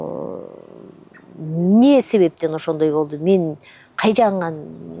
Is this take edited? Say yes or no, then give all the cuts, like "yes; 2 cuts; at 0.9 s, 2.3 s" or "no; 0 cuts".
no; 0 cuts